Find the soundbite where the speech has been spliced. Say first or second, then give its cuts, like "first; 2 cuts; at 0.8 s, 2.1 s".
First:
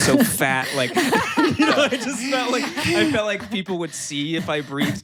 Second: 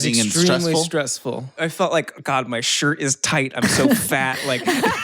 second; 1 cut; at 1.5 s